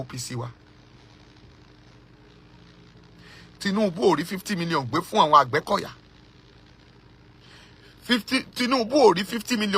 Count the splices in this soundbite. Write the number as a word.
zero